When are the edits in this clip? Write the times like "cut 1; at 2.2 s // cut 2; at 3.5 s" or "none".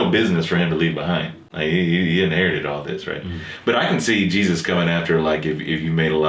cut 1; at 1.4 s